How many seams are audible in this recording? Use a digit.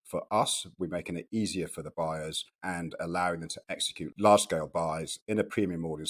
2